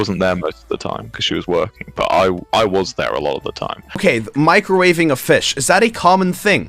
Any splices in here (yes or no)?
yes